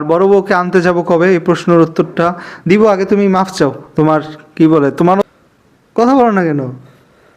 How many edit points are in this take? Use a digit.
1